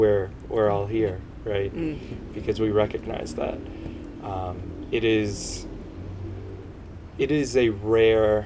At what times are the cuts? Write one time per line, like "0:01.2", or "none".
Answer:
none